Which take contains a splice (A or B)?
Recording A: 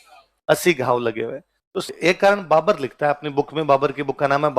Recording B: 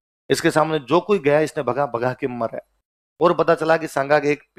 A